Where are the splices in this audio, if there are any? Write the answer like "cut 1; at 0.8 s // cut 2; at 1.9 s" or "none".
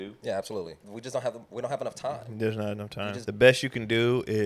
cut 1; at 0.9 s // cut 2; at 3.2 s